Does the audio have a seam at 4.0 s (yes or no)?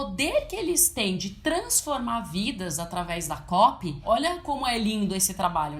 yes